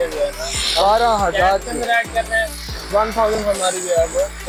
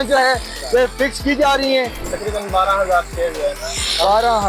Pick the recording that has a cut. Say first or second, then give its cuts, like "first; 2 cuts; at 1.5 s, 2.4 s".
second; 1 cut; at 2.0 s